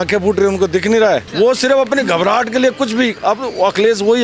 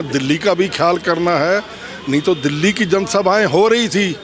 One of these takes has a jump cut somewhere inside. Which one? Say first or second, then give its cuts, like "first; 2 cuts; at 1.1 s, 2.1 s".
first; 1 cut; at 1.3 s